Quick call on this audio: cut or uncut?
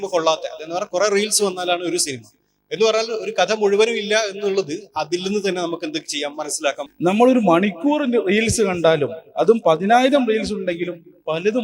cut